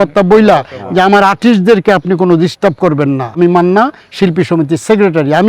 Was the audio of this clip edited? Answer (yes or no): yes